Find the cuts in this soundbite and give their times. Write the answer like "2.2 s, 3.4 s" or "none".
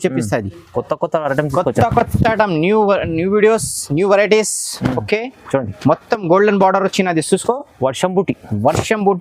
none